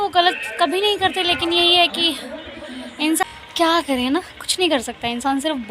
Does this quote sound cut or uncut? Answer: cut